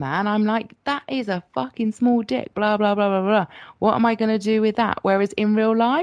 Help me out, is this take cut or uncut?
uncut